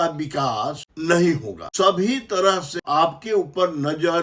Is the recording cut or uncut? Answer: cut